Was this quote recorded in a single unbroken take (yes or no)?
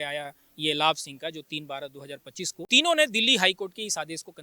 no